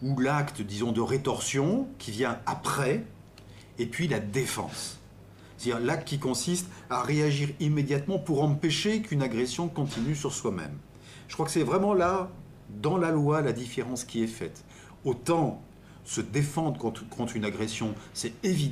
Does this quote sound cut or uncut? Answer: uncut